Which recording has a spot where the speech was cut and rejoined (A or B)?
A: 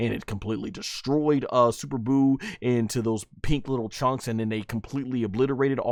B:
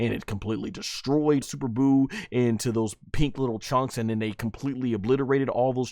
B